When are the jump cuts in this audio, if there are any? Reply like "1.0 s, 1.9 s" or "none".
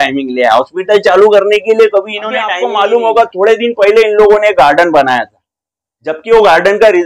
2.5 s